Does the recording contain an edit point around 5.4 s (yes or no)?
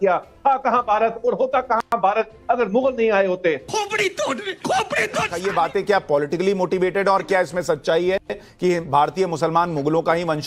yes